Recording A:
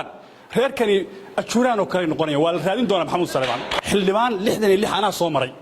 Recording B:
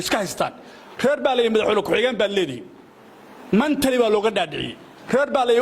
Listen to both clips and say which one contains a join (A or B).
A